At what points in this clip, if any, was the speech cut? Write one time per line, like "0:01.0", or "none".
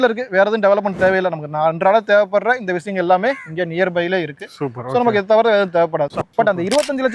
0:06.2